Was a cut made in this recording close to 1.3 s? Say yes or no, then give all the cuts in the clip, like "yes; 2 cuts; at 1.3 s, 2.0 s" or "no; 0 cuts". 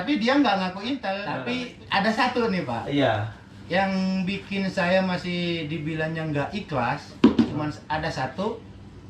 yes; 1 cut; at 1.3 s